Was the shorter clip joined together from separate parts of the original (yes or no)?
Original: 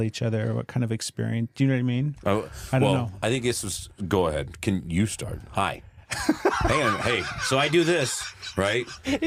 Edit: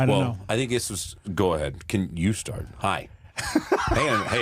no